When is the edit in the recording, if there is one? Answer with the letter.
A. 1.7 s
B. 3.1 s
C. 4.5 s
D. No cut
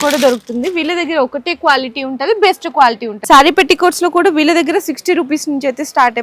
B